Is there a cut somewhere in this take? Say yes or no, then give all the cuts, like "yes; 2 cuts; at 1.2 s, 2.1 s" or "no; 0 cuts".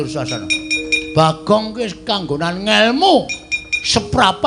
yes; 1 cut; at 1.0 s